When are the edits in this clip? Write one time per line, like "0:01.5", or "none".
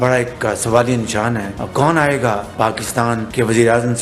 0:01.5